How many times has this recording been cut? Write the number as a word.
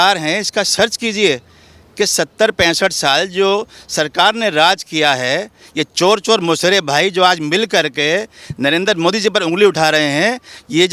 zero